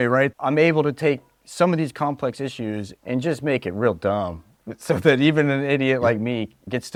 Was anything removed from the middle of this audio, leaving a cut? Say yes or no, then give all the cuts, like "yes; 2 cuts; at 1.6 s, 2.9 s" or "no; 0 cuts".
no; 0 cuts